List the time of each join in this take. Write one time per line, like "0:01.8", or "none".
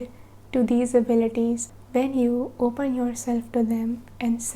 0:01.7